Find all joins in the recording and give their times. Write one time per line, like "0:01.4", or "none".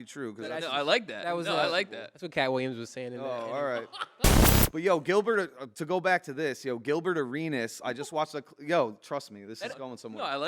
0:04.3